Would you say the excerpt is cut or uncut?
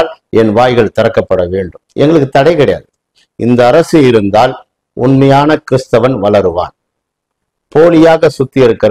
cut